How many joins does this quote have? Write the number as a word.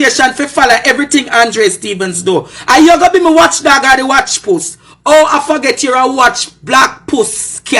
zero